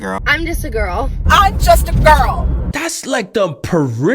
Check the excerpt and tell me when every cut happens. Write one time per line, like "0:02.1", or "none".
0:01.2
0:02.7